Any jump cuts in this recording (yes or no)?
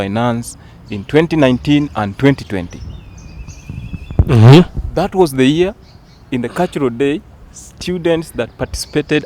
no